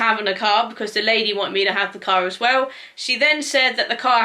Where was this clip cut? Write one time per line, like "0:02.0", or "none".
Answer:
none